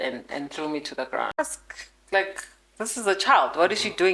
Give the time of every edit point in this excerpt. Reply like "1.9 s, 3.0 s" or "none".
1.4 s